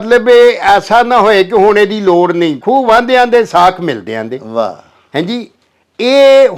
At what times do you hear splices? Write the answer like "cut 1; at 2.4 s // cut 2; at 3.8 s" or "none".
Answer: cut 1; at 2.6 s